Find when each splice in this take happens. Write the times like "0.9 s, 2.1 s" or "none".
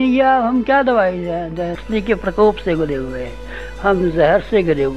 1.8 s